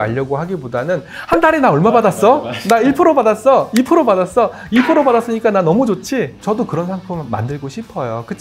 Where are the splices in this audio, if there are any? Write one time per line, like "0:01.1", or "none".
0:06.4